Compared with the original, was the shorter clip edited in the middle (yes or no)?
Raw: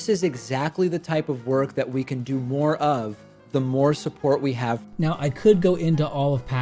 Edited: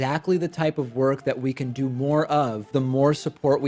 yes